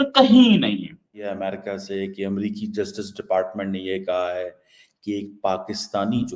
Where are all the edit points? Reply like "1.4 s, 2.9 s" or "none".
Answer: 1.3 s